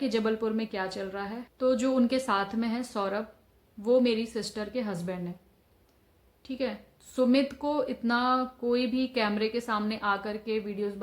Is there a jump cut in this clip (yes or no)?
yes